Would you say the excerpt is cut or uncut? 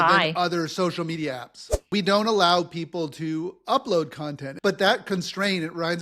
cut